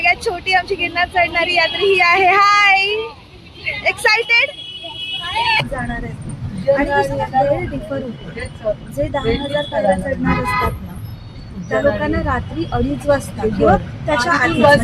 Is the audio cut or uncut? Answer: cut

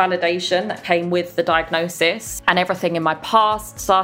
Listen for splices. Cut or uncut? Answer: cut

